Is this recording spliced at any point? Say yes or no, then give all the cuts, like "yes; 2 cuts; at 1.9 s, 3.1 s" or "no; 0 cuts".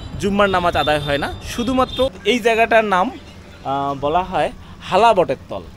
yes; 1 cut; at 2.3 s